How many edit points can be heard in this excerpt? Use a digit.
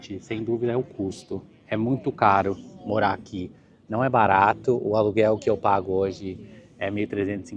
0